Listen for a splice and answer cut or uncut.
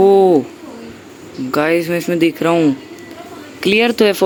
uncut